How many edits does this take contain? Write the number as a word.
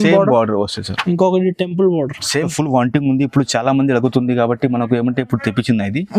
one